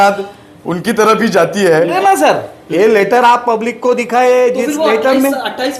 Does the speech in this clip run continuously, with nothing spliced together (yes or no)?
no